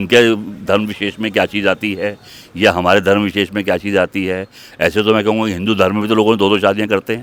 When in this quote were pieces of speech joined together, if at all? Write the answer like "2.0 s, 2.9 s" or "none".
none

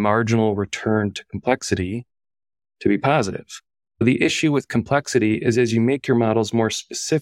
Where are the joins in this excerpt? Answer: 3.8 s

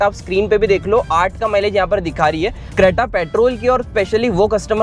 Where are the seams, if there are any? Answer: 2.7 s

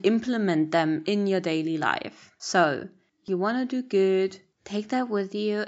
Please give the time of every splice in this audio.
3.2 s

